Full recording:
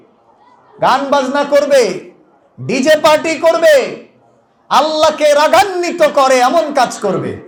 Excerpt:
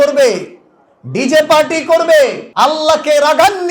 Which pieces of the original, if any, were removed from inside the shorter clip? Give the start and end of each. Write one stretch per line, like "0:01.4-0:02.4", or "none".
0:04.0-0:04.6